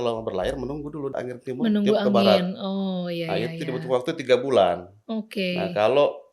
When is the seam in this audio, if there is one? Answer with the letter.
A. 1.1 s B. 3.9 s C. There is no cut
A